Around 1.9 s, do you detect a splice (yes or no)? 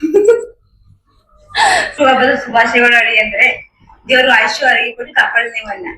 yes